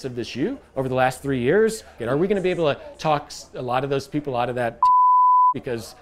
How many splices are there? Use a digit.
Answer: 1